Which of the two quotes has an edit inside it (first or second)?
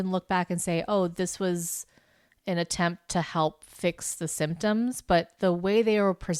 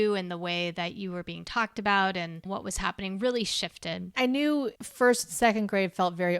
second